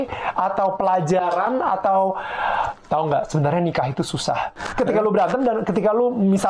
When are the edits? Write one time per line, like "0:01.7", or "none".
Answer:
0:04.6